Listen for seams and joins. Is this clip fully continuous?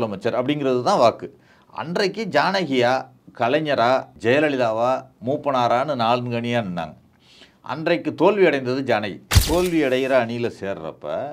no; 3 cuts; at 3.2 s, 4.1 s, 9.3 s

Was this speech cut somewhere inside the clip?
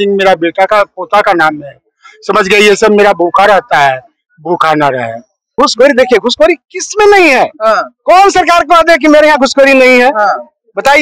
yes; 1 cut; at 5.5 s

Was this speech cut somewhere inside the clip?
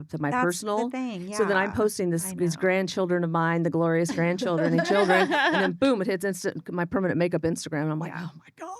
no; 0 cuts

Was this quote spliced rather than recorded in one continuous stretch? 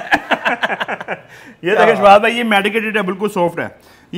no; 0 cuts

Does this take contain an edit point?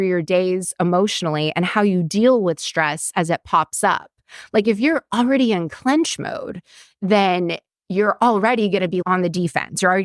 no; 0 cuts

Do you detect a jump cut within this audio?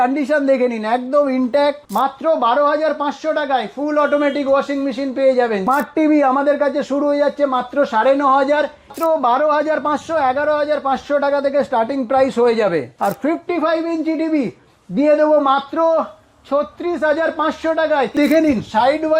yes; 5 cuts; at 1.8 s, 5.6 s, 8.9 s, 12.9 s, 18.2 s

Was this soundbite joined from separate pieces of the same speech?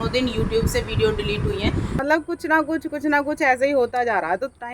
yes; 1 cut; at 2.0 s

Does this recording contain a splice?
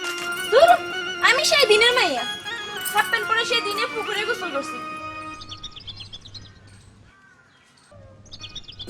no; 0 cuts

